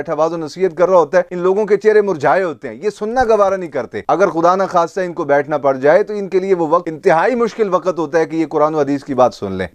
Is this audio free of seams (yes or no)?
yes